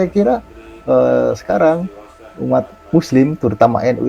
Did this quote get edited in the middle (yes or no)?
yes